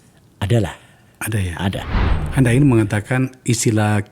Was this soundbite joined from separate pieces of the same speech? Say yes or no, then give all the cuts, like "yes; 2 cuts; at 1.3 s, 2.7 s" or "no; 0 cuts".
yes; 1 cut; at 2.0 s